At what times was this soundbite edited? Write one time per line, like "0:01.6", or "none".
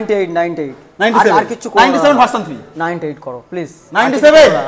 none